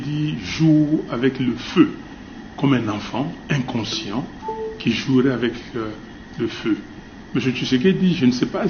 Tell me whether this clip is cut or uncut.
uncut